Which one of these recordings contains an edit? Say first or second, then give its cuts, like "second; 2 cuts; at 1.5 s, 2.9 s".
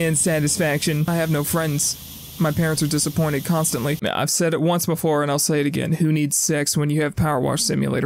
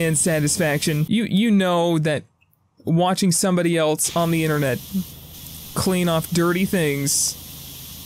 first; 2 cuts; at 1.0 s, 4.0 s